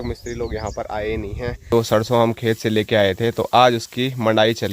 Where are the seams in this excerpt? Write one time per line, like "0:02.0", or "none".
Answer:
0:01.7